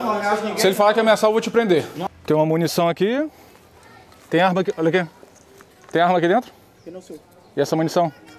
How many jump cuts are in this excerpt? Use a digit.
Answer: 1